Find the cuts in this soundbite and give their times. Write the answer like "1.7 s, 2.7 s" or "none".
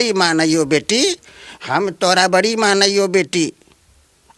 none